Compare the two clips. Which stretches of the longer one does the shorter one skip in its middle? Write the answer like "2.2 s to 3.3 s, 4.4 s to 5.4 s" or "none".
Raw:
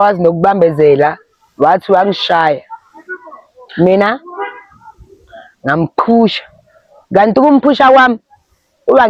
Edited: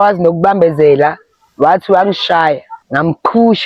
2.8 s to 5.5 s

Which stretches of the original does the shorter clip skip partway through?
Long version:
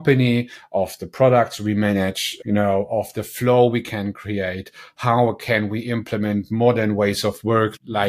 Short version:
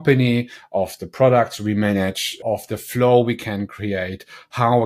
2.4 s to 2.9 s

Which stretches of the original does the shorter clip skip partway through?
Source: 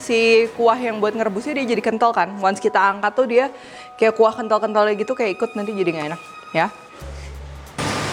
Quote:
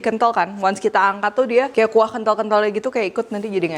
3.5 s to 3.9 s

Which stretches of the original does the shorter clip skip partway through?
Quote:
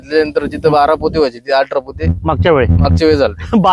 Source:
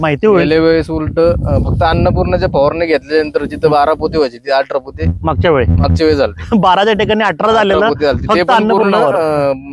none

